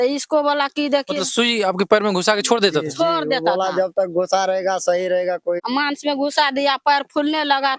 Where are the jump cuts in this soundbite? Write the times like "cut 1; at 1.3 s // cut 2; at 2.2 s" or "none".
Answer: cut 1; at 5.6 s